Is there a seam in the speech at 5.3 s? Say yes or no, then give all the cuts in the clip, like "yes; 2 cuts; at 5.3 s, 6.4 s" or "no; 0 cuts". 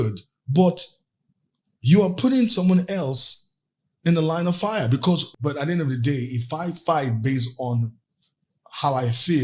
yes; 1 cut; at 5.3 s